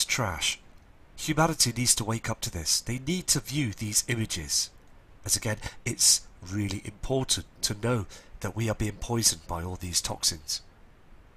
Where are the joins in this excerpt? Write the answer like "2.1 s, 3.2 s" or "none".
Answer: none